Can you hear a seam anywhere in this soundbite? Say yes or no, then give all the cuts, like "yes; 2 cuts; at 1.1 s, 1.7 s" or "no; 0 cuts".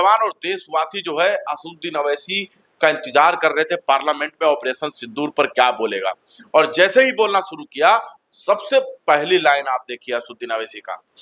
no; 0 cuts